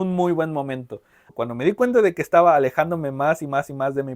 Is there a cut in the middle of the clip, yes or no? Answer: yes